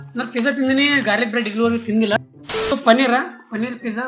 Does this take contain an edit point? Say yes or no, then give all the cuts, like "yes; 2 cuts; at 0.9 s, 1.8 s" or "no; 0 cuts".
yes; 1 cut; at 2.8 s